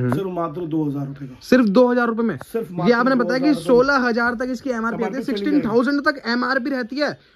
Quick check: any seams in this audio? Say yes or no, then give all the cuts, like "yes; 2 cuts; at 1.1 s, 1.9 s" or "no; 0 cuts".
no; 0 cuts